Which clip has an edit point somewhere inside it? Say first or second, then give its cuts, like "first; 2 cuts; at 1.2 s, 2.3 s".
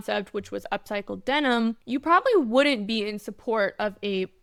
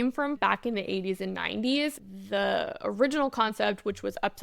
second; 1 cut; at 2.0 s